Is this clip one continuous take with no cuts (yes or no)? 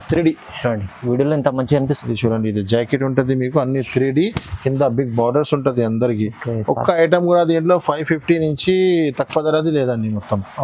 no